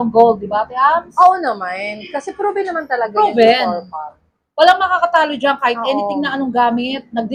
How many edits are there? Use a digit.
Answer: 0